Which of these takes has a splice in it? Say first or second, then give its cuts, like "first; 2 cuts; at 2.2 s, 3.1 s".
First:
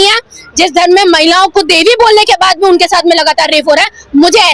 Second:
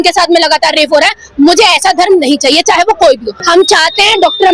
second; 1 cut; at 3.3 s